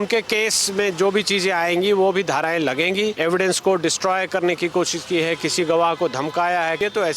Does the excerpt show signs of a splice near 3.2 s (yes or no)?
yes